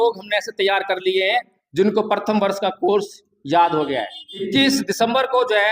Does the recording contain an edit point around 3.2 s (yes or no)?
no